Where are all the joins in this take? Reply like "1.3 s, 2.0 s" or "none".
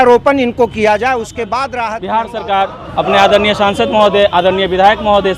2.0 s